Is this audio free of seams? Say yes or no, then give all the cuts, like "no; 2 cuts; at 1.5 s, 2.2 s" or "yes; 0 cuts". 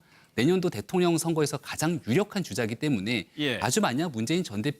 no; 1 cut; at 1.5 s